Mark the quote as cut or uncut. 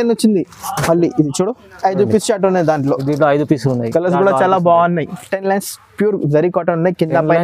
cut